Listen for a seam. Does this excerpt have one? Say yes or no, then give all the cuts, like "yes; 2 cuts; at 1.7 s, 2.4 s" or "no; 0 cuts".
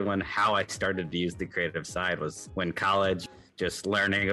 yes; 2 cuts; at 2.4 s, 3.2 s